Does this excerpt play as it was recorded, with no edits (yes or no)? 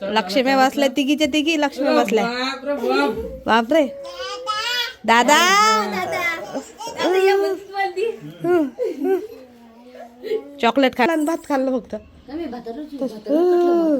no